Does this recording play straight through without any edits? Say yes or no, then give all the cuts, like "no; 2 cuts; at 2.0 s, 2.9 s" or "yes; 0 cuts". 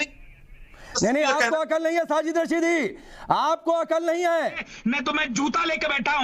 no; 2 cuts; at 0.9 s, 4.7 s